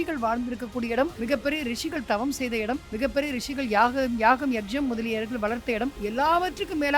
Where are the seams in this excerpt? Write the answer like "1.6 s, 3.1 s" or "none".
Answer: 1.2 s, 2.9 s, 6.0 s